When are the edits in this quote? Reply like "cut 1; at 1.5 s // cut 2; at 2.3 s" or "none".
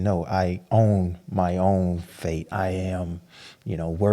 cut 1; at 2.4 s